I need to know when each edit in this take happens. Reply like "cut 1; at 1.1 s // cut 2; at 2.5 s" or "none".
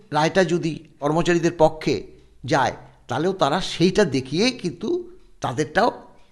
cut 1; at 1.0 s